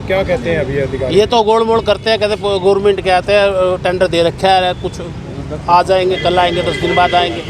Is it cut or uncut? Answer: uncut